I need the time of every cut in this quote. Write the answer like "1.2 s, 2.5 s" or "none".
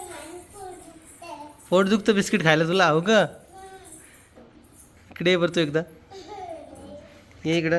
none